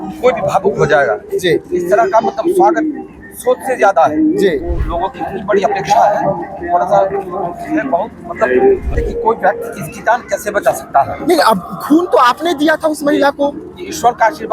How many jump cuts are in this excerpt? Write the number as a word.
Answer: two